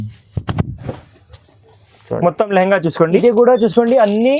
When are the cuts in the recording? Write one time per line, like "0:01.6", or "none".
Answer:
0:03.1

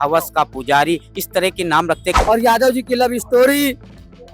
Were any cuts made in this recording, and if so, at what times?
0:02.1

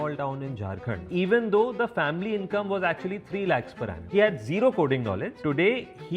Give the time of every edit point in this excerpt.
0:01.0
0:04.1
0:05.3

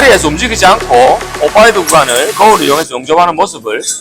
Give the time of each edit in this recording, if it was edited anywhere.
0:01.3

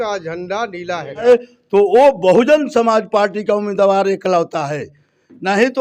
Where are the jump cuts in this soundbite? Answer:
0:01.2

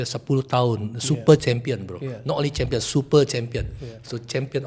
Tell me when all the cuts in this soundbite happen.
none

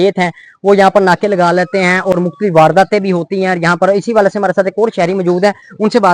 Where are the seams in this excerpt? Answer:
none

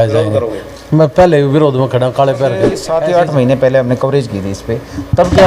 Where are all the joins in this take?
0:02.8

